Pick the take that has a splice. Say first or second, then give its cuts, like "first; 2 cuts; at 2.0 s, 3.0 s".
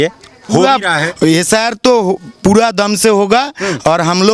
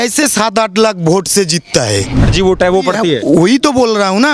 second; 1 cut; at 2.2 s